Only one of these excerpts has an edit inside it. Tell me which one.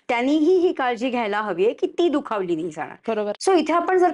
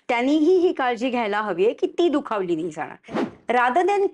second; 1 cut; at 3.1 s

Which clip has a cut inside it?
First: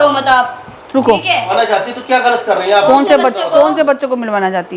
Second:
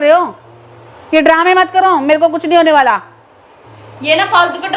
first; 1 cut; at 1.5 s

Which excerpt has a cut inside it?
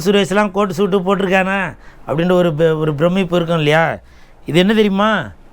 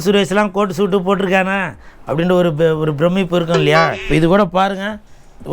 second; 1 cut; at 4.0 s

